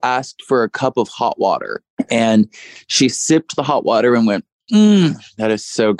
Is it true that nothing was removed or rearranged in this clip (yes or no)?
no